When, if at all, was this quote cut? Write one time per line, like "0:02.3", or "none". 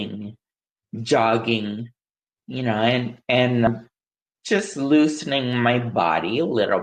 0:03.7